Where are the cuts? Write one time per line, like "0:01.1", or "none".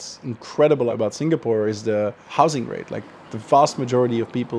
0:00.9
0:02.2